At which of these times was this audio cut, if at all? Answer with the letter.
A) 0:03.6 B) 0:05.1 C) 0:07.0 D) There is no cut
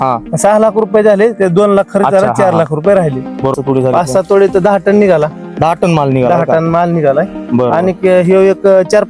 A